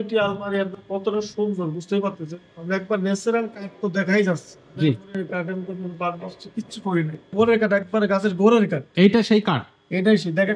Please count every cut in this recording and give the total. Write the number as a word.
one